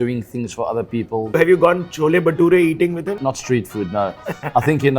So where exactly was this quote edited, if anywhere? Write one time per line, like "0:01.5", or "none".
0:01.3
0:03.2